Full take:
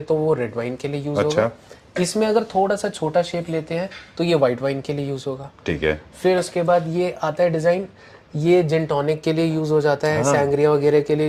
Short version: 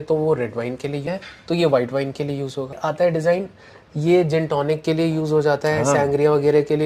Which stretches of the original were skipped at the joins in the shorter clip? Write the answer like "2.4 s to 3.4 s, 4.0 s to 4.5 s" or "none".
1.0 s to 3.7 s, 5.5 s to 7.2 s